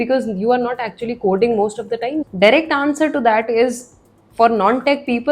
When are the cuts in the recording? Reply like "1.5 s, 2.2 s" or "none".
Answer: 2.2 s